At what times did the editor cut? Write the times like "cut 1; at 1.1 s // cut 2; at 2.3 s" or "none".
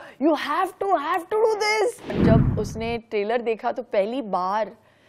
cut 1; at 2.2 s